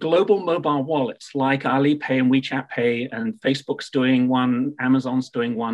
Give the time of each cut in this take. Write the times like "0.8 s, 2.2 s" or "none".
none